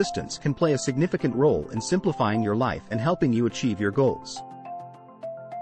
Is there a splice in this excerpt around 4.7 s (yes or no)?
yes